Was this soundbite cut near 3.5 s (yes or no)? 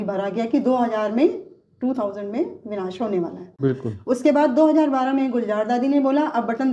yes